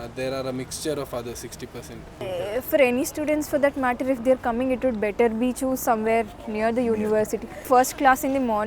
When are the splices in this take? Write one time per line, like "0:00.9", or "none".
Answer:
0:02.1
0:07.5